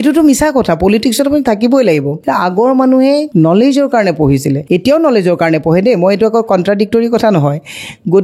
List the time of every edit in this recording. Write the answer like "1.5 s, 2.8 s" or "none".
2.1 s, 3.3 s, 4.6 s